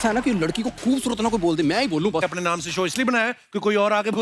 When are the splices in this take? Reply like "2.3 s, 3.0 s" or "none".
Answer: 2.2 s

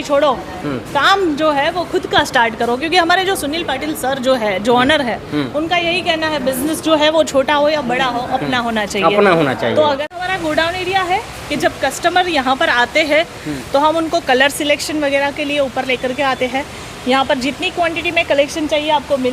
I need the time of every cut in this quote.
10.0 s

